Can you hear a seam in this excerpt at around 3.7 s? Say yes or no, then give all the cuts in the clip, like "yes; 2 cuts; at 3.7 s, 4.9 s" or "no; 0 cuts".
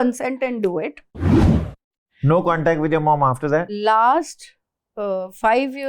yes; 2 cuts; at 1.5 s, 3.7 s